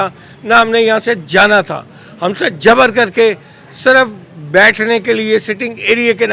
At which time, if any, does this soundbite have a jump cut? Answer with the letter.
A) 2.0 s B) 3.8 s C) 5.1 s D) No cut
D